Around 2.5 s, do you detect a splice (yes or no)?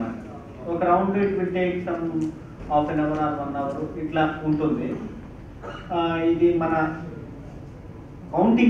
yes